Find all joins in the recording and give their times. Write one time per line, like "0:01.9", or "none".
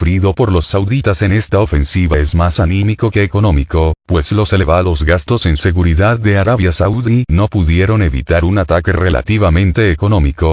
0:04.0